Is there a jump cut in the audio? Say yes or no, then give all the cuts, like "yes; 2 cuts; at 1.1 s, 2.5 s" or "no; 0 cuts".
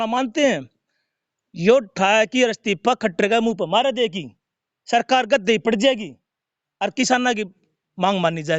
no; 0 cuts